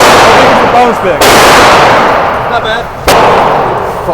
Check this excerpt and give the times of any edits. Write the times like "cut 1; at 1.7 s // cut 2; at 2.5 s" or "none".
cut 1; at 3.1 s